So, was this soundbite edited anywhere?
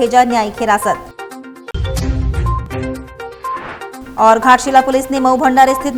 no; 0 cuts

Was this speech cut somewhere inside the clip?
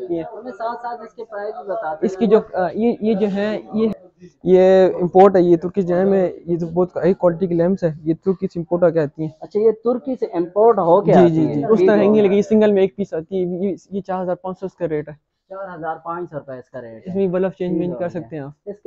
yes; 2 cuts; at 3.9 s, 11.7 s

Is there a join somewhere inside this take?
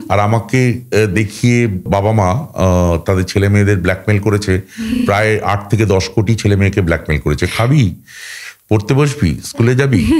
yes; 1 cut; at 1.8 s

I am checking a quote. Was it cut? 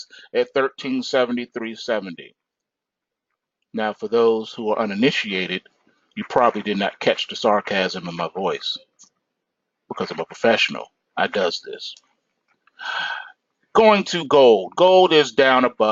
no; 0 cuts

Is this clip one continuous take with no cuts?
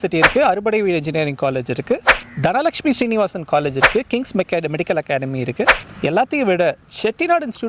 yes; 0 cuts

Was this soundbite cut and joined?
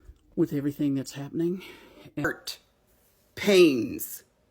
yes; 1 cut; at 2.2 s

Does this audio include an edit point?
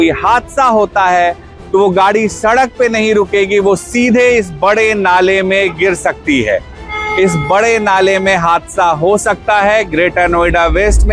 no; 0 cuts

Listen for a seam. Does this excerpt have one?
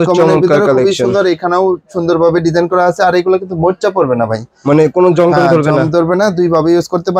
no; 0 cuts

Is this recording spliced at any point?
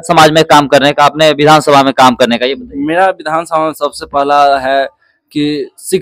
no; 0 cuts

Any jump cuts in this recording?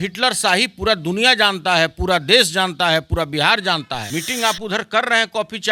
yes; 1 cut; at 4.0 s

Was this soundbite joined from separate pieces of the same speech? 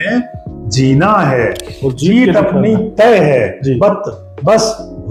no; 0 cuts

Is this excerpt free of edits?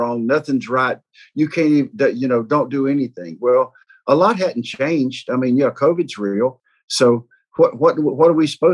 no; 1 cut; at 6.7 s

